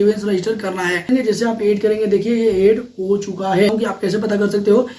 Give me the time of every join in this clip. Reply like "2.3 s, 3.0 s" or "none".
1.1 s, 3.7 s